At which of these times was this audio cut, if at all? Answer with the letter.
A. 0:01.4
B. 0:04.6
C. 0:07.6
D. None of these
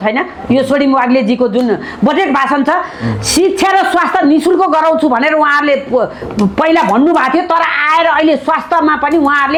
D